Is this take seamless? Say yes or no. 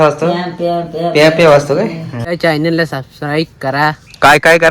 no